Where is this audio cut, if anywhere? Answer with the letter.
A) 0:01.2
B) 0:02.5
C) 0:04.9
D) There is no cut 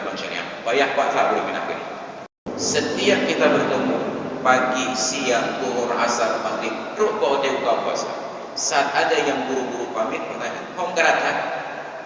B